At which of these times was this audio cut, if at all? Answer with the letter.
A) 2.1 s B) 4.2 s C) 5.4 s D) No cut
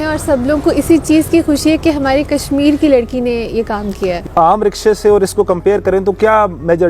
B